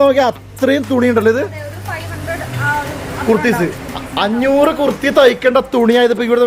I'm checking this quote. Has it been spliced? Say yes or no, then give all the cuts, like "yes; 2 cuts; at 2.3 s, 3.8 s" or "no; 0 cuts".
no; 0 cuts